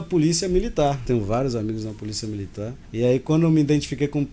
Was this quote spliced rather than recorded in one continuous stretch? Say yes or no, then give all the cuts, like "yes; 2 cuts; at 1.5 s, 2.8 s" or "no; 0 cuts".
yes; 2 cuts; at 1.0 s, 2.8 s